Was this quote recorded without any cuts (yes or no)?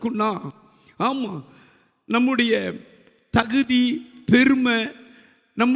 yes